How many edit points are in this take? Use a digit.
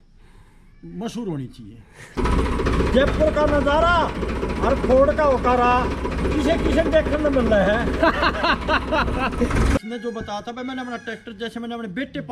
2